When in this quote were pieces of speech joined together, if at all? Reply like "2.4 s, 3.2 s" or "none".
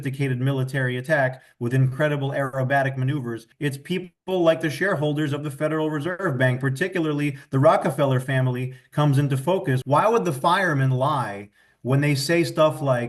3.5 s, 9.9 s